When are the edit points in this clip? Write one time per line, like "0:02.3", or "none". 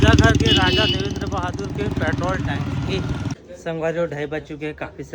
0:03.4